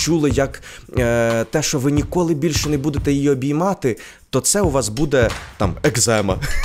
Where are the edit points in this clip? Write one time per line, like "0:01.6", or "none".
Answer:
none